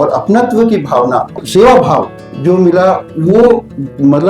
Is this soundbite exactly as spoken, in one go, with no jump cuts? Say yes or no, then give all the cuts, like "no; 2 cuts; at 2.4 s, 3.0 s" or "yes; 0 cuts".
no; 1 cut; at 1.4 s